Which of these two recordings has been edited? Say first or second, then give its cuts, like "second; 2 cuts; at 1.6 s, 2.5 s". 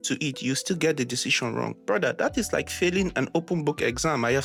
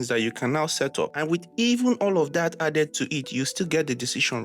second; 1 cut; at 1.1 s